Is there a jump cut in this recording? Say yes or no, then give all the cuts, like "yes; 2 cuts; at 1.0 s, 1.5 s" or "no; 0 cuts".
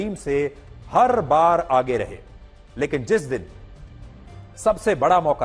no; 0 cuts